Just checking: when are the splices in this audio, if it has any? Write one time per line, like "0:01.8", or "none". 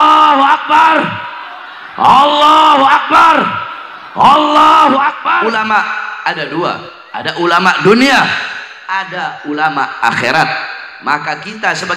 0:05.4

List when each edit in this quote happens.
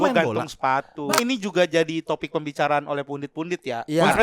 0:01.1

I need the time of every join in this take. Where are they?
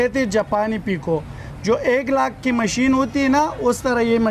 none

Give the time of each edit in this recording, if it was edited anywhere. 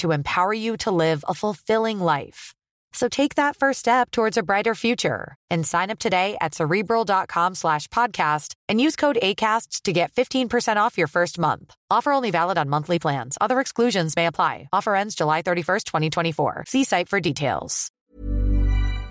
0:17.9

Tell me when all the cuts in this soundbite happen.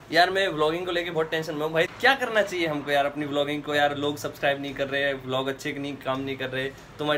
0:01.9

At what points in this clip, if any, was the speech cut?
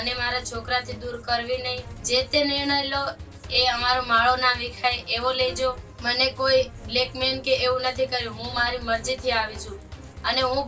0:01.9
0:05.9

